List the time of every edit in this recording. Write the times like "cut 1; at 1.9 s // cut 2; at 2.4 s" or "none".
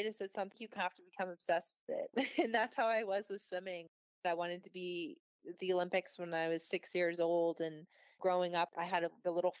cut 1; at 4.2 s